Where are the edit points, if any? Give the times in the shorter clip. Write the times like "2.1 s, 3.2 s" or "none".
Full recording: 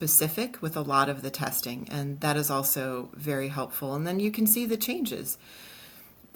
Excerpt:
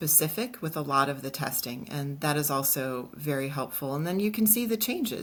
none